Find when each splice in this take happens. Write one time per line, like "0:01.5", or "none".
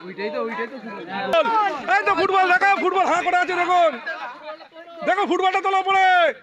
0:01.3